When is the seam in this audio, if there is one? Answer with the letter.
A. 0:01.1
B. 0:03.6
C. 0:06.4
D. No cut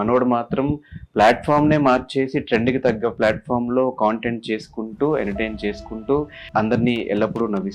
C